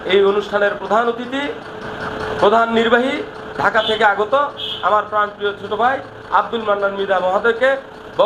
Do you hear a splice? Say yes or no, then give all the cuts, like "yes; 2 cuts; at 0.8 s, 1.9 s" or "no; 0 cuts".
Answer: no; 0 cuts